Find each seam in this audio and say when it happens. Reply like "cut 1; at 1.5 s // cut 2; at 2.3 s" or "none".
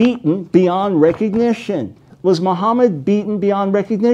cut 1; at 2.1 s